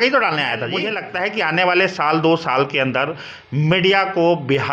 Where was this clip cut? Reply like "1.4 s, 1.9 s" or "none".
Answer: 1.0 s